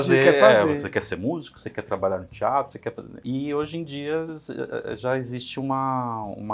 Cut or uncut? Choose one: uncut